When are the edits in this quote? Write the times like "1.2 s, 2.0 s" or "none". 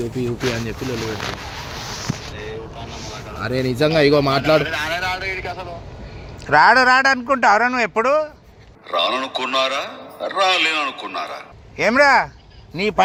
none